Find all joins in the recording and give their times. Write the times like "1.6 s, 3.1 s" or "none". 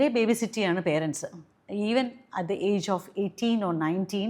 none